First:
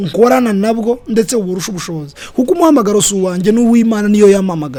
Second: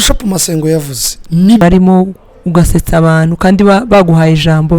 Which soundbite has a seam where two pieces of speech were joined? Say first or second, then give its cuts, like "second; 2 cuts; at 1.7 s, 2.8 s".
second; 1 cut; at 1.6 s